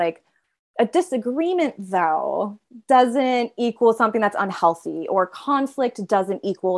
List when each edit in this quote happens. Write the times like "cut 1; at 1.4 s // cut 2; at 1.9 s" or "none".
none

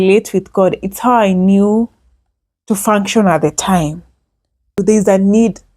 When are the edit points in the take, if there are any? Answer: cut 1; at 4.8 s

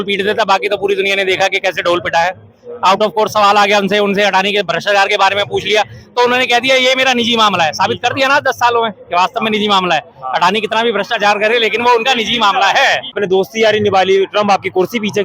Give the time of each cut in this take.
cut 1; at 13.2 s

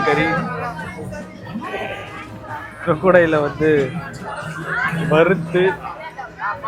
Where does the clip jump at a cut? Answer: cut 1; at 2.3 s

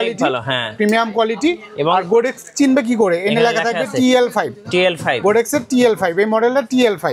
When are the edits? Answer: none

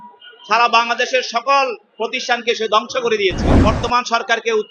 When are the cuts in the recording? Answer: cut 1; at 3.5 s

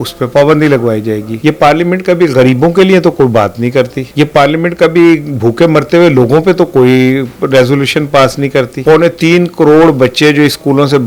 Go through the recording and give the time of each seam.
cut 1; at 1.3 s // cut 2; at 4.0 s // cut 3; at 8.7 s

